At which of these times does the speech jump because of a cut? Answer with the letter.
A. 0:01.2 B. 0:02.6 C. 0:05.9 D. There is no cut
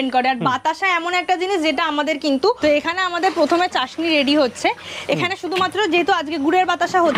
B